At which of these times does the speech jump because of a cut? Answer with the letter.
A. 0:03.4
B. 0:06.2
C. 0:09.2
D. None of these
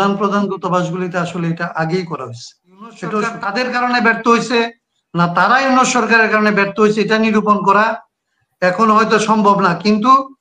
A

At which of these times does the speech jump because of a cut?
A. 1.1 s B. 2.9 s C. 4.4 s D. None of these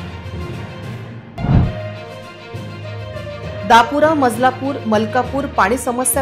A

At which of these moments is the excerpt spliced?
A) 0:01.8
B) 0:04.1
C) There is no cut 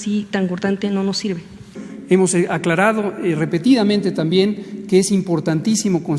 A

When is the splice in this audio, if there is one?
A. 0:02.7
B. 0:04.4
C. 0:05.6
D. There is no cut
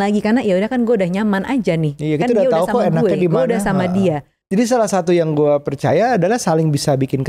B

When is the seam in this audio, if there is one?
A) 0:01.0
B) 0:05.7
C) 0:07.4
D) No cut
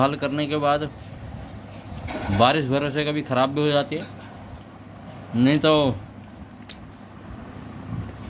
D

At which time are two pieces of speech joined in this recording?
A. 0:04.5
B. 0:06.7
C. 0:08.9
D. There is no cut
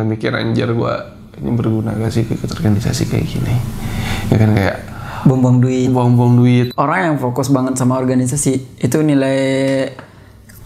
B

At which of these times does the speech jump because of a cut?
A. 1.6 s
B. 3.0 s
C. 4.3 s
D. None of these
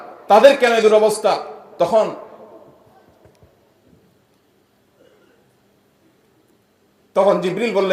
D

